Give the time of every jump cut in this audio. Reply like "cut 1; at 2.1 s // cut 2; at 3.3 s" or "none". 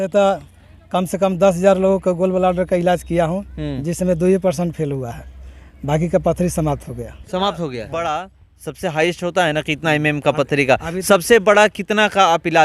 cut 1; at 7.9 s